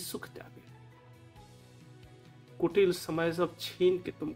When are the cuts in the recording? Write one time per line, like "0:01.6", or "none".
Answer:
0:00.9
0:02.5